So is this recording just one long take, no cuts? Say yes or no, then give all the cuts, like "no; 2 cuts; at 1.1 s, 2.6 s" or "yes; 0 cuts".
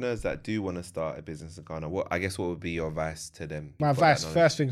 yes; 0 cuts